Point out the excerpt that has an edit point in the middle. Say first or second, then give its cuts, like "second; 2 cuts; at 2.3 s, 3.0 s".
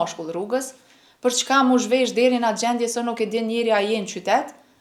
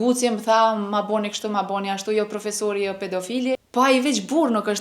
second; 1 cut; at 3.7 s